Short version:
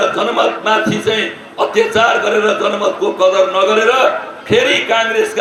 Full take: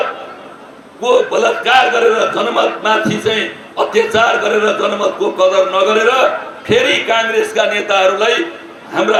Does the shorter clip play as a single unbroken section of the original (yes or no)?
yes